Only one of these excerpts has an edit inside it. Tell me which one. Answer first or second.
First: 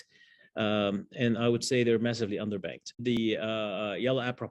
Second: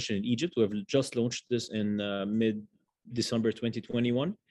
first